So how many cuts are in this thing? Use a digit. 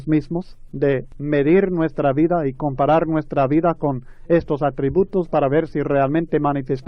1